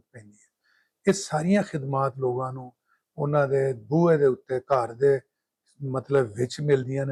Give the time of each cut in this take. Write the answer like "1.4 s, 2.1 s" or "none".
none